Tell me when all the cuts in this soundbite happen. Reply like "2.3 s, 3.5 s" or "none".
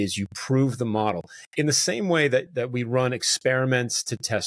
2.5 s